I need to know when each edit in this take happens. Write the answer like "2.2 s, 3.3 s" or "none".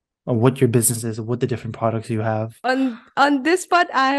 2.5 s